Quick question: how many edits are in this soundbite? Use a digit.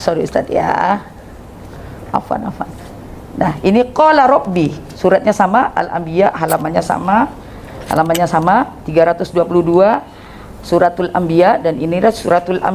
0